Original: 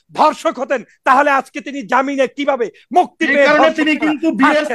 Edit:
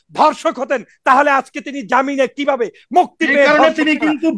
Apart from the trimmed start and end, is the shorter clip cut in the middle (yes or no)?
no